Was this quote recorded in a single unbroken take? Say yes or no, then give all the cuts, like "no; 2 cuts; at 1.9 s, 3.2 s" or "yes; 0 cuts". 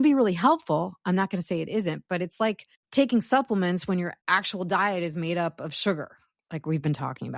no; 2 cuts; at 2.7 s, 4.2 s